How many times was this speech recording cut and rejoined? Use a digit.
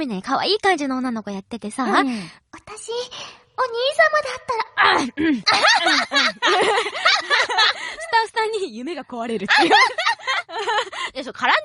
1